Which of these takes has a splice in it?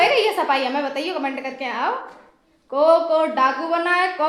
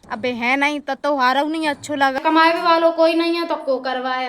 second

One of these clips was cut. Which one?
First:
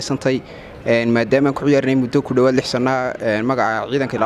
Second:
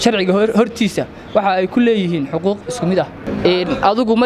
second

